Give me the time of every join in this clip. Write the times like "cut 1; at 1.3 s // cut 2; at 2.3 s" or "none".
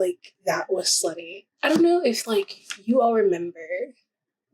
cut 1; at 1.5 s